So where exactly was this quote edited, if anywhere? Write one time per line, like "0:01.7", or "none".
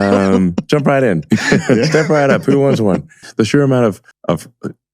0:03.3